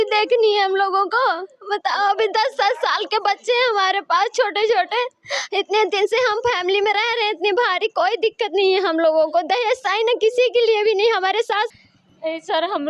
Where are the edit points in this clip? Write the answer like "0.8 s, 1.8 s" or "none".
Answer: 11.7 s